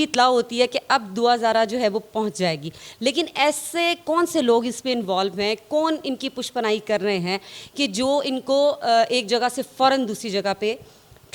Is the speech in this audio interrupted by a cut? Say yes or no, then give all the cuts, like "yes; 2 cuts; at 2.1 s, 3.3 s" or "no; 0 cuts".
no; 0 cuts